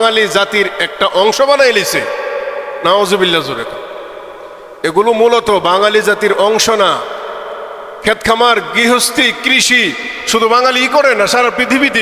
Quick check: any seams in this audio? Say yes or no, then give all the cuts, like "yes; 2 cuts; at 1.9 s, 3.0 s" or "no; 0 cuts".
no; 0 cuts